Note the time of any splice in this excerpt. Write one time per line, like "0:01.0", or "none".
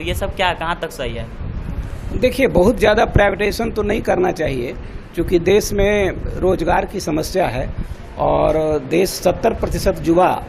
none